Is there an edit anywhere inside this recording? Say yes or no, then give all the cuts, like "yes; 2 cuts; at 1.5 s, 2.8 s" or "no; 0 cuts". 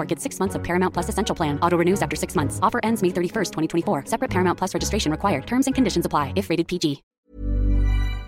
yes; 1 cut; at 7.1 s